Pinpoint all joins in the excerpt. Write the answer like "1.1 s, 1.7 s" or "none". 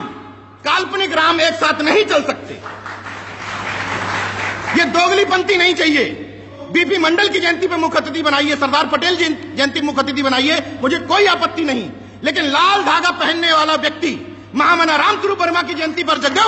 none